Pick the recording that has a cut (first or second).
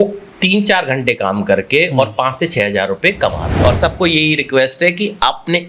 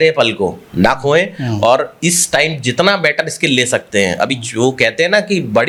first